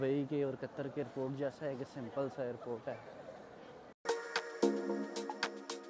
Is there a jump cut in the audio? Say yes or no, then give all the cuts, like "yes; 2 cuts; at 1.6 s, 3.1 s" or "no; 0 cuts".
yes; 1 cut; at 4.0 s